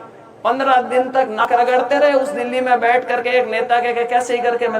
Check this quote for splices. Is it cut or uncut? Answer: cut